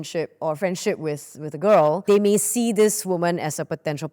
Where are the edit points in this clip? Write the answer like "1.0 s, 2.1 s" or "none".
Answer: 2.0 s